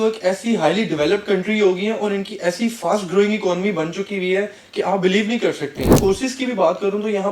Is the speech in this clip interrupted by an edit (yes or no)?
yes